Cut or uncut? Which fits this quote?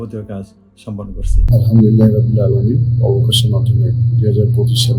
cut